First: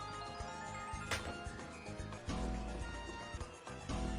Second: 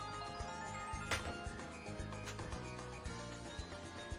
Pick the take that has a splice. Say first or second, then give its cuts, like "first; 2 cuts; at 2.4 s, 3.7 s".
first; 2 cuts; at 2.2 s, 3.4 s